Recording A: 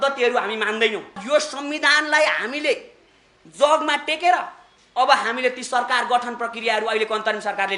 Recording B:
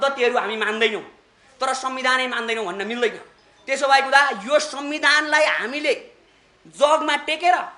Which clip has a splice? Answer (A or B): A